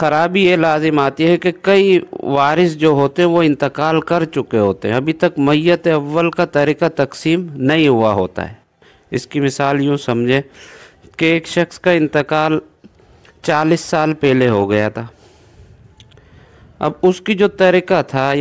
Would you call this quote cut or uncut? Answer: uncut